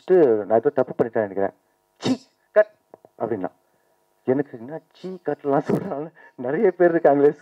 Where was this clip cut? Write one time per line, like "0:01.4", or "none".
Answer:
none